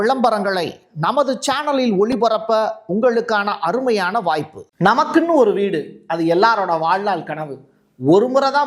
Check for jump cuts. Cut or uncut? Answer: cut